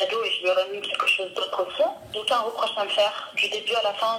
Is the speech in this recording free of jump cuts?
no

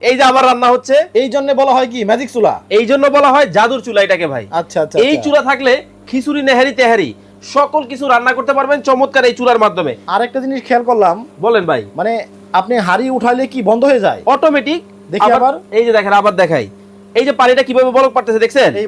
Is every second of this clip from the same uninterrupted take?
no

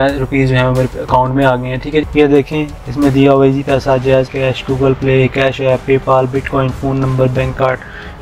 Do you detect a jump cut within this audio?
yes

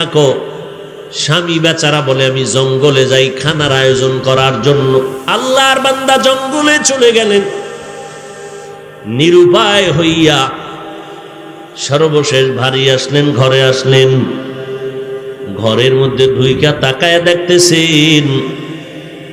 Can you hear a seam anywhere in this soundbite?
yes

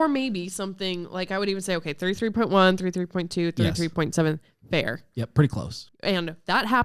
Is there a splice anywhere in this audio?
yes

